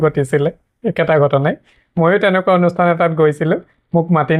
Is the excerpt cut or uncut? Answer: uncut